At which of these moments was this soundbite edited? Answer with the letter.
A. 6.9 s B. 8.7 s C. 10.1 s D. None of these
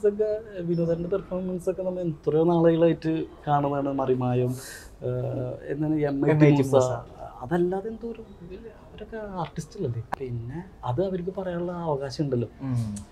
C